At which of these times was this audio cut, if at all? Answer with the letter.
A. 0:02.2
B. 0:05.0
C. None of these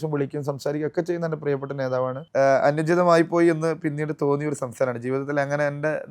A